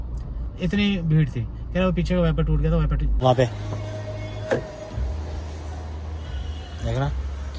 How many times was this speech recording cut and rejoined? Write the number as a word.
one